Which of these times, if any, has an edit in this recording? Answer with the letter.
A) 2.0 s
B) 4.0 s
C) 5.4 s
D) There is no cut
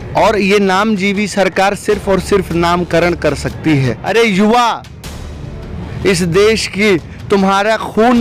B